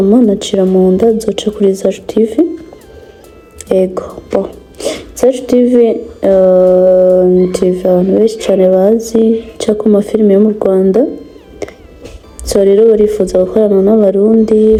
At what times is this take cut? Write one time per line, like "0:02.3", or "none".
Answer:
none